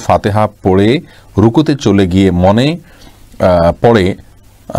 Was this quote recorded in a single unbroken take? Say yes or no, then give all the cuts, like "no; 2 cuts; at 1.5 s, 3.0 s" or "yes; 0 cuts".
yes; 0 cuts